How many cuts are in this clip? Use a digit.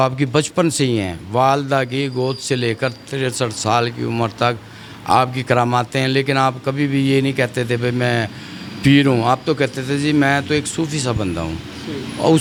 0